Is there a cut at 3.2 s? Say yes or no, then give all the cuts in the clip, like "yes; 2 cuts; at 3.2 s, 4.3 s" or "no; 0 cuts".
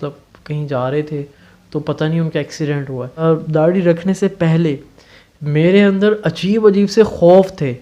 yes; 1 cut; at 3.2 s